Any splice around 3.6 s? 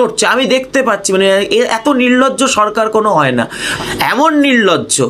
yes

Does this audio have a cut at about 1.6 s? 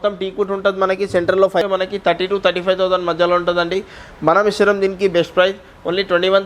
yes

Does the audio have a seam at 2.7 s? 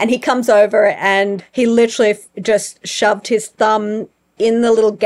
no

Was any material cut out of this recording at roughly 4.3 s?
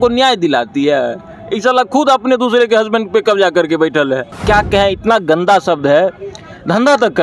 yes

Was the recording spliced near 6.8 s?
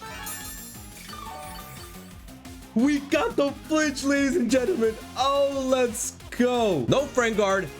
yes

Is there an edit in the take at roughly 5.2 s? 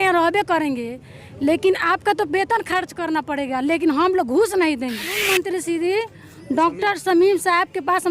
yes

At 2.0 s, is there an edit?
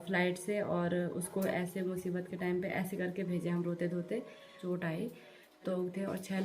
no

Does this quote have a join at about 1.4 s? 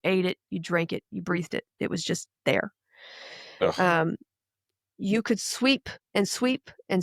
no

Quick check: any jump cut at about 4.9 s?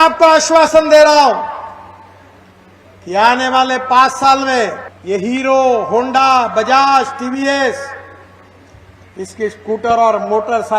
yes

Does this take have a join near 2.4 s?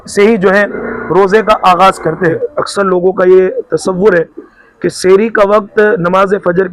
yes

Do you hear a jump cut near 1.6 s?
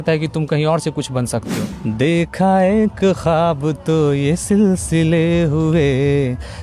yes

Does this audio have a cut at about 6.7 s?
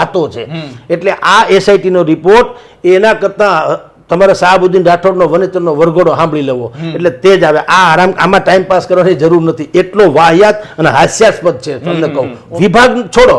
no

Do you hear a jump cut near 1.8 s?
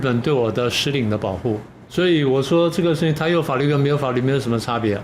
yes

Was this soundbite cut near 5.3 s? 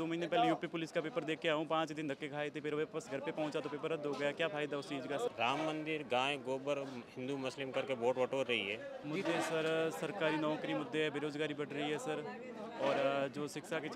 yes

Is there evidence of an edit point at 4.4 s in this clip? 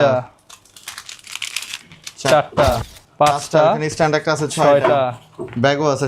no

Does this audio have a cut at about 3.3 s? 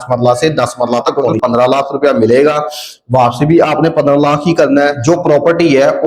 no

